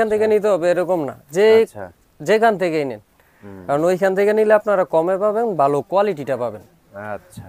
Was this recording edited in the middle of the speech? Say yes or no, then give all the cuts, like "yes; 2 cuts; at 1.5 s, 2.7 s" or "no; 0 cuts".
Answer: no; 0 cuts